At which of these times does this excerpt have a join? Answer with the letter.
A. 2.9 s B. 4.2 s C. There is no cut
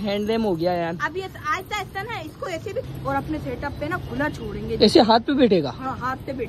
A